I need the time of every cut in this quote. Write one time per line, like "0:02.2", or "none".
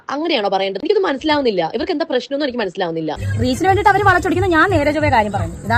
0:03.2

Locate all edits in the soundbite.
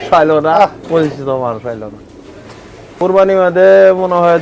0:03.0

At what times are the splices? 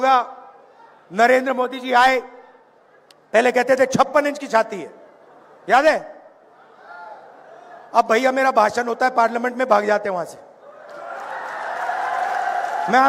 none

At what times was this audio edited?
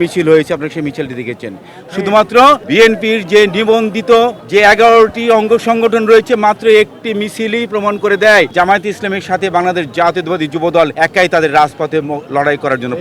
0:02.6
0:04.4
0:08.5
0:10.9

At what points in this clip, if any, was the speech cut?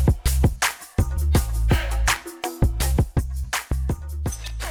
none

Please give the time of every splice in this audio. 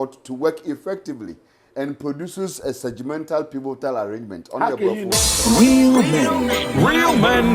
0:05.1

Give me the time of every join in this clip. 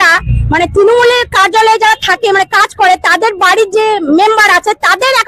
none

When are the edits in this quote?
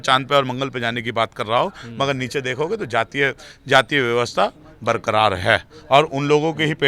none

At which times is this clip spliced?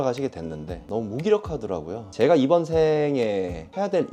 0:02.0

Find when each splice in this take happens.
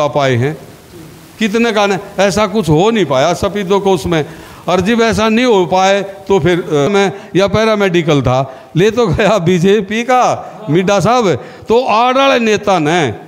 0:06.9

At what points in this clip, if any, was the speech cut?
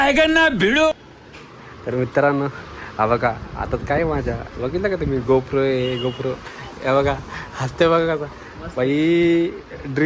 0:01.1

